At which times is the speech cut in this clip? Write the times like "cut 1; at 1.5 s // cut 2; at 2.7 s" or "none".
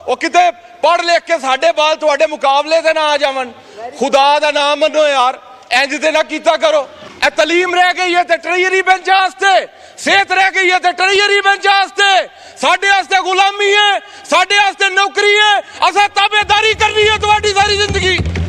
cut 1; at 7.0 s